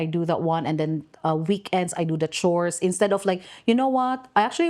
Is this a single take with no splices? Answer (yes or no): yes